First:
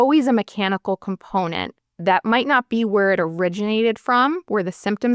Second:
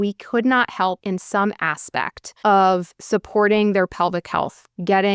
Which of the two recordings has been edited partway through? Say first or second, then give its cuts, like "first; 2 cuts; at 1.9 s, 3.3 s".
second; 2 cuts; at 1.0 s, 2.2 s